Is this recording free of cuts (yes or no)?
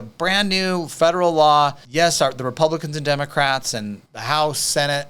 no